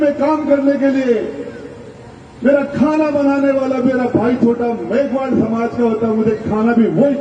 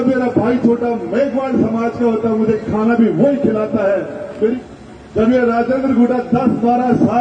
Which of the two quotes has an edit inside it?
second; 1 cut; at 4.6 s

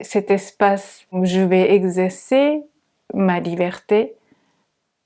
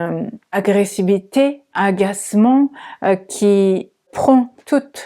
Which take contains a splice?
second; 2 cuts; at 1.7 s, 4.1 s

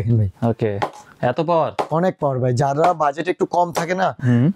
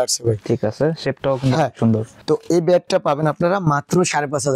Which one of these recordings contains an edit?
second; 1 cut; at 2.1 s

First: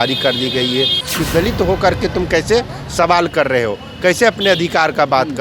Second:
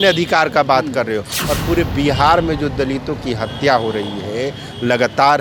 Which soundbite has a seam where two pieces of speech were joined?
first; 1 cut; at 1.0 s

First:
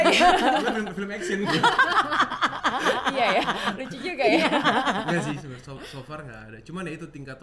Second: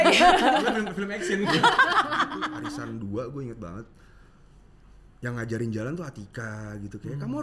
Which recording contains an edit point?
second; 1 cut; at 2.4 s

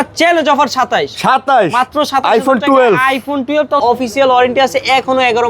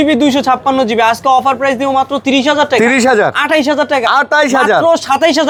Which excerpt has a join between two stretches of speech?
first; 1 cut; at 3.8 s

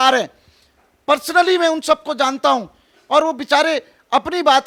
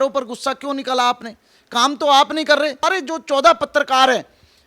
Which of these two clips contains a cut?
second; 1 cut; at 2.8 s

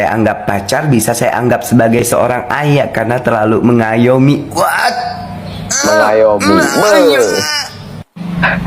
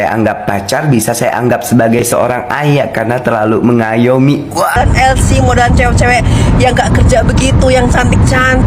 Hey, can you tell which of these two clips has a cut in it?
second; 1 cut; at 4.8 s

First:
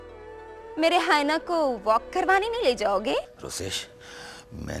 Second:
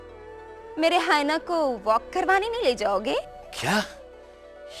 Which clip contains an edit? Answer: first; 1 cut; at 3.3 s

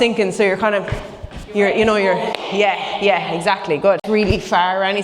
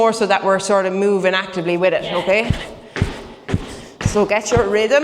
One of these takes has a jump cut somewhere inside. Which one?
first; 1 cut; at 4.0 s

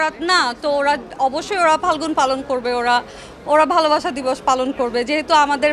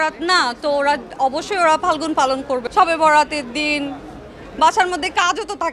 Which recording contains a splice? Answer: second; 1 cut; at 2.6 s

